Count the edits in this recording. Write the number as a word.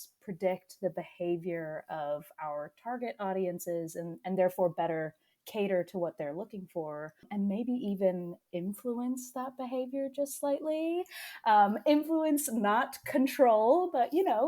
one